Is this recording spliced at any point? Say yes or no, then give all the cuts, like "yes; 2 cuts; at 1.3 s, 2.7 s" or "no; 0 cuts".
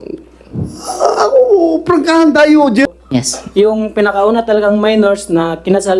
yes; 1 cut; at 2.9 s